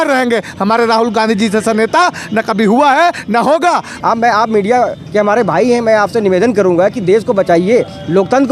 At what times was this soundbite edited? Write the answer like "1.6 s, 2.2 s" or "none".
4.0 s